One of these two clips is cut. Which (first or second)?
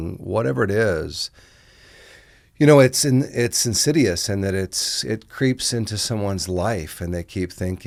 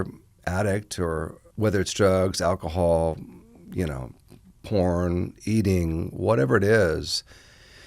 second